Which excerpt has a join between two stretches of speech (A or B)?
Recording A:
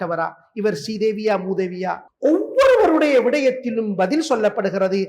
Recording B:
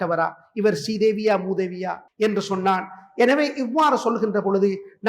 B